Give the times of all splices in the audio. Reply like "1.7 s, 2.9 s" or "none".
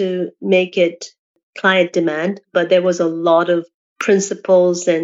1.4 s